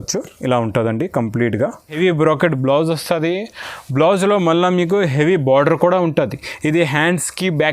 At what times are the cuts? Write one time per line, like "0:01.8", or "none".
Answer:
0:02.0